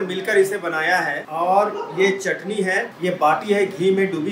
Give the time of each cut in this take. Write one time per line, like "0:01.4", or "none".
0:01.2
0:02.9